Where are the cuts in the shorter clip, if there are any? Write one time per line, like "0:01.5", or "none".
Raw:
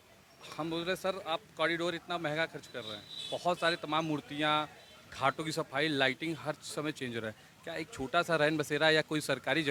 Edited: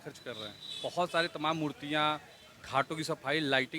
none

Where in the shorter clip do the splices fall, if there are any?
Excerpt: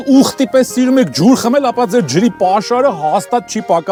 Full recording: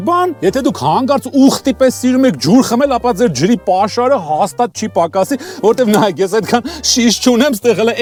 none

